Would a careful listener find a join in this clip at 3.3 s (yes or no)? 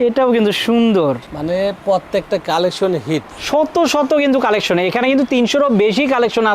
yes